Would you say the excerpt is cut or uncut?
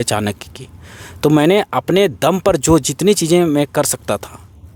uncut